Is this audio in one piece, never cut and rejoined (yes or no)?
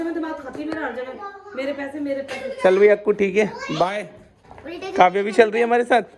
yes